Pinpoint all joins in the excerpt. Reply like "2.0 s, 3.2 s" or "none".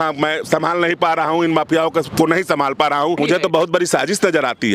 3.2 s